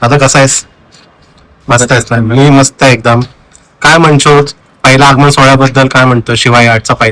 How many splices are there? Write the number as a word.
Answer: zero